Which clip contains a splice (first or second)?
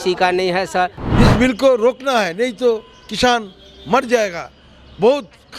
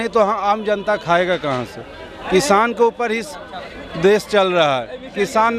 first